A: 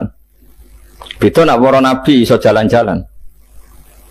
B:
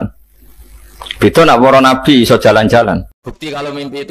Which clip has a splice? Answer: B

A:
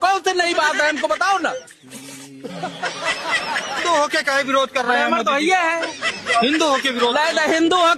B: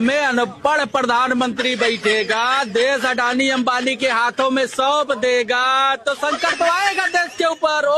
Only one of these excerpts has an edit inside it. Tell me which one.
A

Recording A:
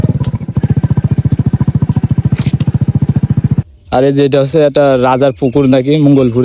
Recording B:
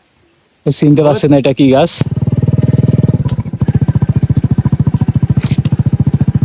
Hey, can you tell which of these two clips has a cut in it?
B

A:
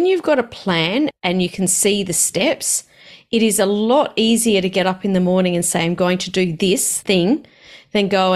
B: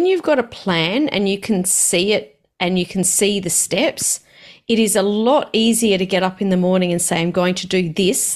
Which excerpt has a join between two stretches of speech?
A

